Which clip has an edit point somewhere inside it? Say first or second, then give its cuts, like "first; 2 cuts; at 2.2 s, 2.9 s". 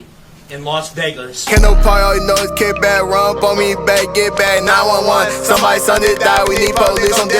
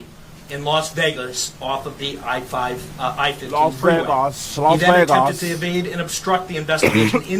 first; 1 cut; at 1.3 s